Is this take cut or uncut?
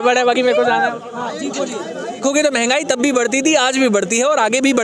cut